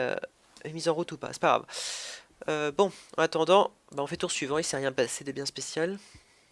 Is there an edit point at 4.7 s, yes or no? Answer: yes